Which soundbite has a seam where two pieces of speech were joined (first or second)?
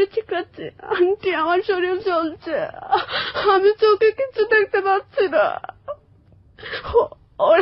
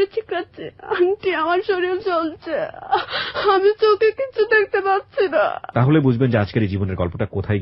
second